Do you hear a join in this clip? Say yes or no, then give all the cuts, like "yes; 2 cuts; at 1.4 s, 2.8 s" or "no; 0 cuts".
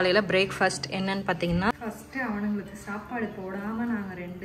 yes; 1 cut; at 1.7 s